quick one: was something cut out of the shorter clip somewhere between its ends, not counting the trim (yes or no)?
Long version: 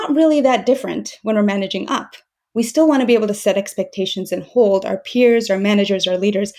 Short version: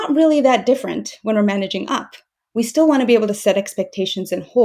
no